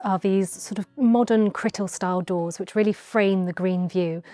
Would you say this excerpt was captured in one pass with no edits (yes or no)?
yes